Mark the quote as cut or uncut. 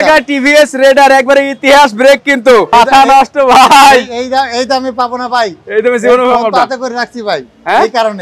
cut